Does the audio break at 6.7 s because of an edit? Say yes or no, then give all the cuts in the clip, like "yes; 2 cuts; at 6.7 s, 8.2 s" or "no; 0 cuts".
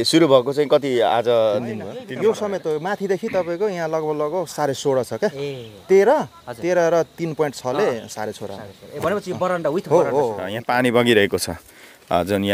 no; 2 cuts; at 2.0 s, 10.5 s